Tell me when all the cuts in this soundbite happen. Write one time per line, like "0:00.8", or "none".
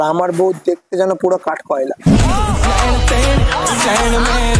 none